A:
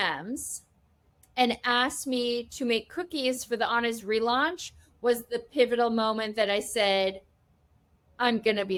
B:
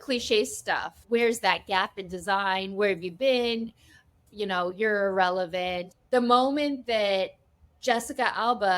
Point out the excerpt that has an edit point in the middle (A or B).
B